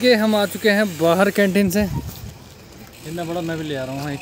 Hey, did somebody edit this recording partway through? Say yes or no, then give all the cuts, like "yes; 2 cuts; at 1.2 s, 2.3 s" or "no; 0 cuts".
no; 0 cuts